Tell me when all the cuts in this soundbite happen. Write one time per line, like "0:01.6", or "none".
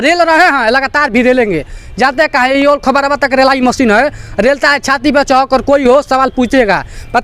none